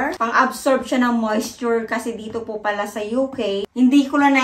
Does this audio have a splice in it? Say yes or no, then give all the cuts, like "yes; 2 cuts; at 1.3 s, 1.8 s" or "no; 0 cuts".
no; 0 cuts